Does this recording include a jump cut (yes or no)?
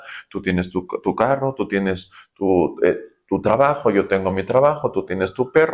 no